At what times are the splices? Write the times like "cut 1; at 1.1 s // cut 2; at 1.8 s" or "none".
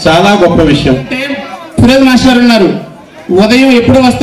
cut 1; at 1.4 s